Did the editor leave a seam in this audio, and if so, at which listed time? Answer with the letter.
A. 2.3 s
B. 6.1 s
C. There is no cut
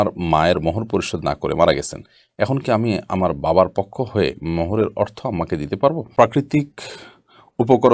B